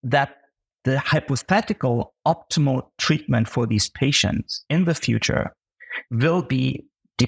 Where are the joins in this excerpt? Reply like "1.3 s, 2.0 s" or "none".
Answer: none